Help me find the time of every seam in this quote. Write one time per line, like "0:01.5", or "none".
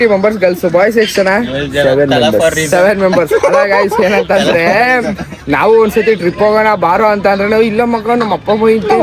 none